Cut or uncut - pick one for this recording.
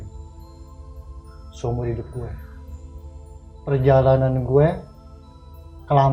cut